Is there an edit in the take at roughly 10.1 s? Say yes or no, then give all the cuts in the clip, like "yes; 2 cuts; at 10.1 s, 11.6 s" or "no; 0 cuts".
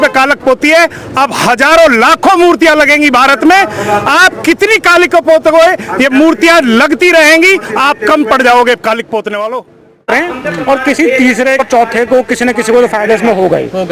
yes; 2 cuts; at 10.1 s, 11.6 s